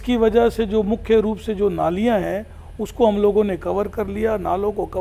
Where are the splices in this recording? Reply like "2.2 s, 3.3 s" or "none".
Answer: none

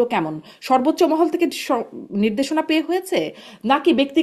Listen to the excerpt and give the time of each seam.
none

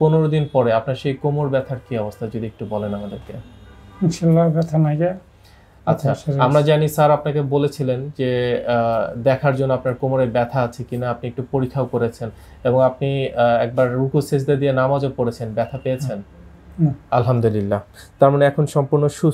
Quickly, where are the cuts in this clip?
none

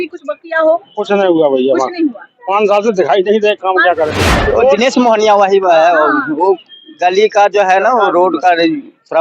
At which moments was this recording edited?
4.2 s

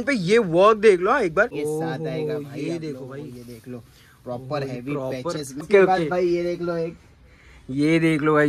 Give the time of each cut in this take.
1.6 s, 5.7 s

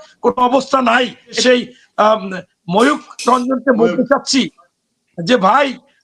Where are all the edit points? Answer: 1.4 s

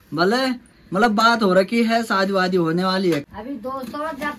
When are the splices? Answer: 3.2 s

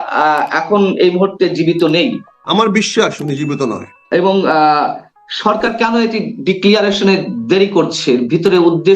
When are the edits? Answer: 2.3 s, 3.9 s

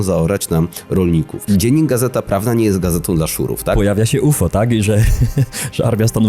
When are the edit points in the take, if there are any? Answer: 1.4 s, 3.7 s

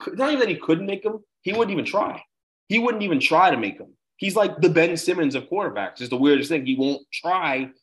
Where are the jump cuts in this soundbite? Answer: none

